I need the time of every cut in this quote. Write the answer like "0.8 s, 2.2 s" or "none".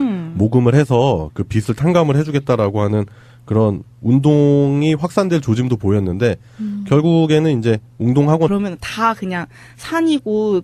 none